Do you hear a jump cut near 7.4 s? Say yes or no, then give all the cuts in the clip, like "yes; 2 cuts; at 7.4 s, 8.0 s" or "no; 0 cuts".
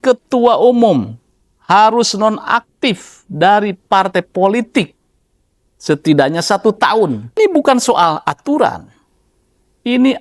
yes; 1 cut; at 7.4 s